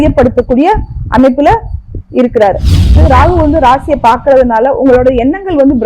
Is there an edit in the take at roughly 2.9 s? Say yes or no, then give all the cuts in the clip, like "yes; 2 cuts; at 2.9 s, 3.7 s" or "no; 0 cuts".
yes; 1 cut; at 2.9 s